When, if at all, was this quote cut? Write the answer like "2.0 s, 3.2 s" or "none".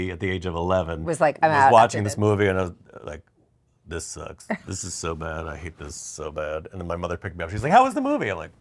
none